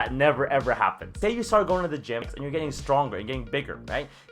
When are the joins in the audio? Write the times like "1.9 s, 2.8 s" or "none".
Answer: 1.1 s, 2.4 s

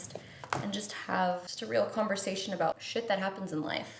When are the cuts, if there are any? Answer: 1.5 s, 2.8 s

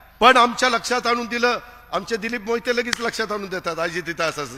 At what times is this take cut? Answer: none

